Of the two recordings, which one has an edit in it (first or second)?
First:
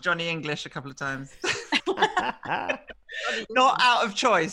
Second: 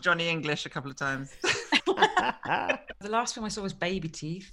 second